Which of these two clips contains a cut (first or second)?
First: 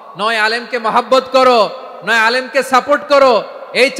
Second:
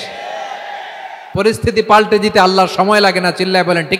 second